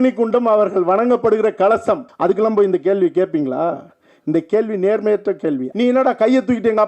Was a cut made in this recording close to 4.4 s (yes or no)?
no